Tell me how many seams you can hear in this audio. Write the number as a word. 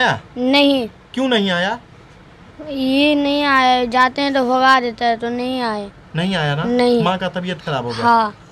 zero